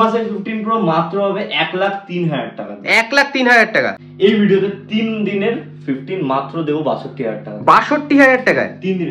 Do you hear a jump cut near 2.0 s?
no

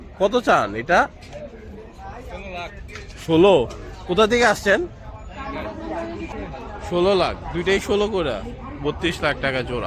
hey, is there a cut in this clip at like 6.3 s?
yes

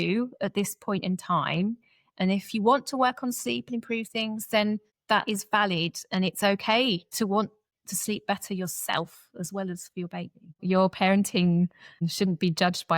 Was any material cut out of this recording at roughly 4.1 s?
no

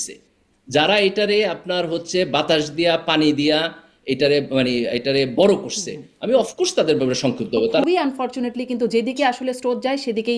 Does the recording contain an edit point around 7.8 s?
yes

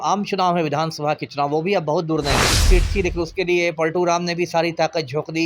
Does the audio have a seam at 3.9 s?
no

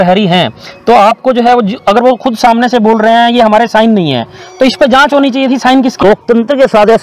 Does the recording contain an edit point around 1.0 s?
no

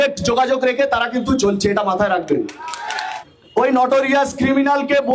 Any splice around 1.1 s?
no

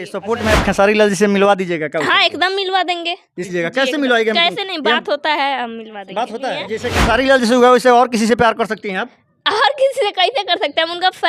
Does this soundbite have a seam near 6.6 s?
yes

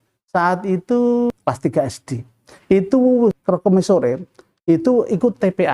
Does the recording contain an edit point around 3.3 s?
yes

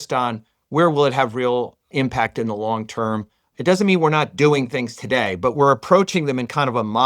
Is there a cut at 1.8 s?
yes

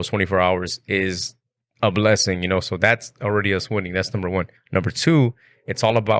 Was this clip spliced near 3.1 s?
no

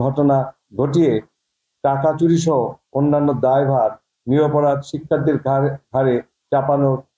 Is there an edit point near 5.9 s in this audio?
no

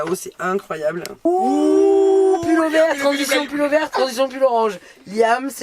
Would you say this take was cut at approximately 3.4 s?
no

